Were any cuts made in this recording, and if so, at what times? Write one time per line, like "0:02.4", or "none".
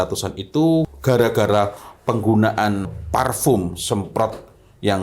0:00.9
0:03.0